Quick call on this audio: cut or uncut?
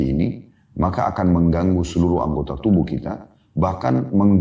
uncut